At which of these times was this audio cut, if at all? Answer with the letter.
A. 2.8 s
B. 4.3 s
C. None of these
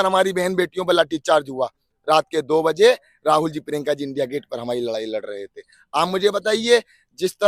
C